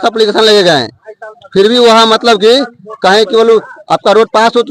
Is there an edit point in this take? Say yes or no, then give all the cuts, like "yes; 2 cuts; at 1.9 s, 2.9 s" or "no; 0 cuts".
no; 0 cuts